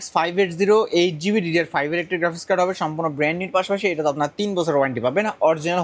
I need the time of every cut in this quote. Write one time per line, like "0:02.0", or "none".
none

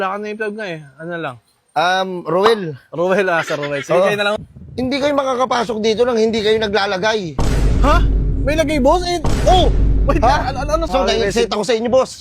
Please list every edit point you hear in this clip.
0:04.4
0:10.9

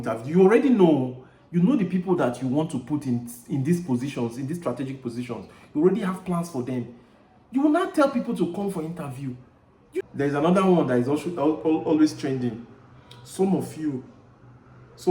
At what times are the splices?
0:10.0

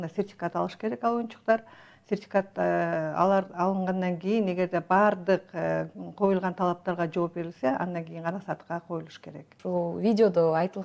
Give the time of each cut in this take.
none

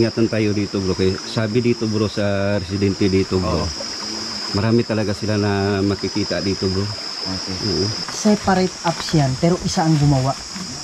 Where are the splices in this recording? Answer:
0:08.0

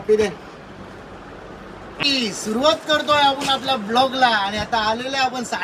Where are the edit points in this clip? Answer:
0:02.0

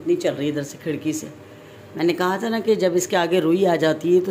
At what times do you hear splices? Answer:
none

